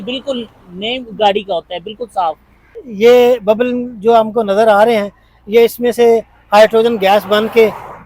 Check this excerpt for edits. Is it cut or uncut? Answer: cut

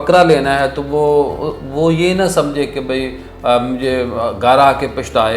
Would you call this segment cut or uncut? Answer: uncut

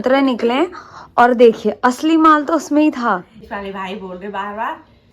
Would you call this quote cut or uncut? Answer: cut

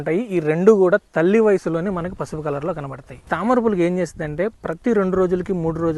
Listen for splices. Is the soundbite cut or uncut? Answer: cut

